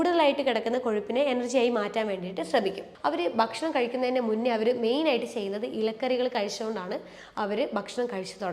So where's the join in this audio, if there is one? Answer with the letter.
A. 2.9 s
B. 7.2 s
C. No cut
A